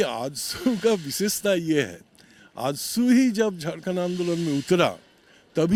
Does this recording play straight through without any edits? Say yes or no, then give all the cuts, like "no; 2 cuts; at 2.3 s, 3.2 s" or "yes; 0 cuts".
yes; 0 cuts